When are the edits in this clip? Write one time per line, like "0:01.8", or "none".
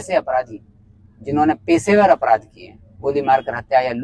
none